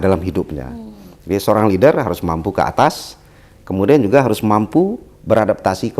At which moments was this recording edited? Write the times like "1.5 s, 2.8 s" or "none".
none